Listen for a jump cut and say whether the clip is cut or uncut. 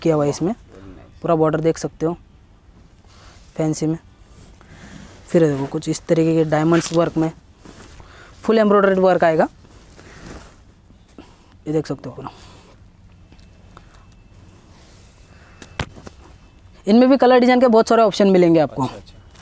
uncut